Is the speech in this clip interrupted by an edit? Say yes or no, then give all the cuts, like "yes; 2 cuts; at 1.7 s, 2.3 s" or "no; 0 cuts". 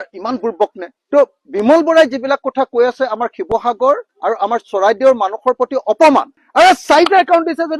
yes; 1 cut; at 6.4 s